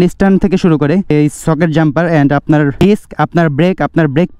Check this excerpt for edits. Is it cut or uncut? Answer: cut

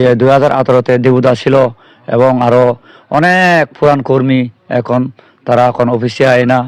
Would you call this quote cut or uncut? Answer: uncut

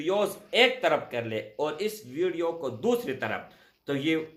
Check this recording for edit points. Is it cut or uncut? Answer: uncut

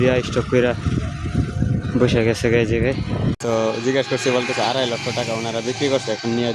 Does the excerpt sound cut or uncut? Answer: cut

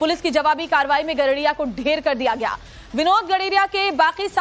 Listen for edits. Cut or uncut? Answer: uncut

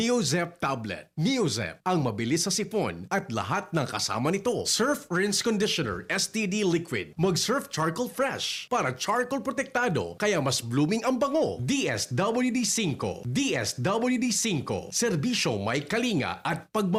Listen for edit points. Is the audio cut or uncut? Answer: uncut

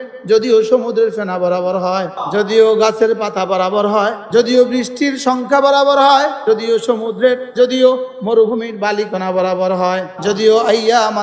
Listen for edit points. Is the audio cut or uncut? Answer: cut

